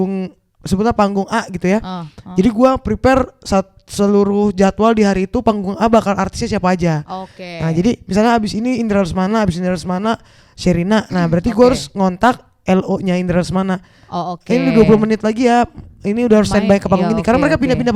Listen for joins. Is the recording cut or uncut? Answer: uncut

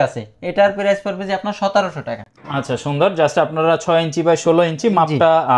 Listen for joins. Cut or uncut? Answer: uncut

